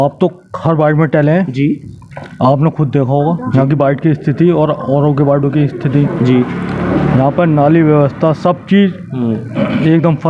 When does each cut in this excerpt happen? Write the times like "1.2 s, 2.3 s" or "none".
none